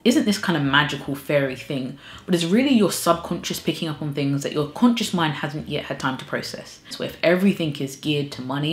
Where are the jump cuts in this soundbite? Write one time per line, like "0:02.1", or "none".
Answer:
0:06.9